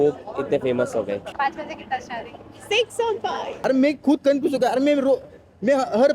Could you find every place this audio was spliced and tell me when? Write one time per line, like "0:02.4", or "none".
0:01.3
0:03.4